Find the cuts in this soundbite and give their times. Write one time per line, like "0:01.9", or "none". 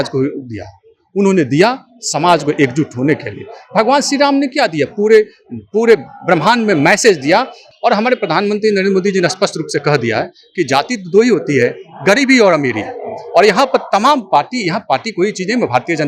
0:07.6